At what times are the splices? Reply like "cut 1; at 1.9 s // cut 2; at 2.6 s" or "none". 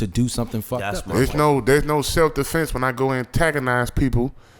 cut 1; at 0.9 s